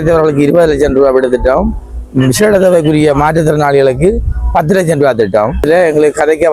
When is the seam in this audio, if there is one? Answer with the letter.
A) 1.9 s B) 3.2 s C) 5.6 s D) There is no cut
C